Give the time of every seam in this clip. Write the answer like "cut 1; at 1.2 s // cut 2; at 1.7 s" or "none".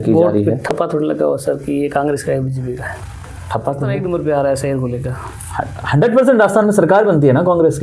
cut 1; at 4.0 s